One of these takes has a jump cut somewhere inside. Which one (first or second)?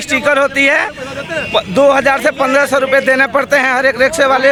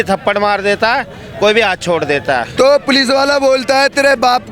second